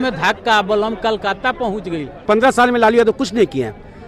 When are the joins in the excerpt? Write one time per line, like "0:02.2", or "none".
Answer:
0:02.1